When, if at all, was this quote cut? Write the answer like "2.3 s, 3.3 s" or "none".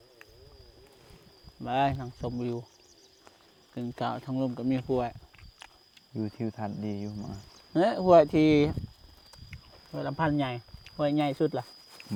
none